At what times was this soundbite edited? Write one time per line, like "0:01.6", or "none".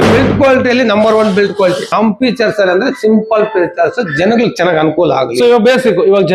0:01.8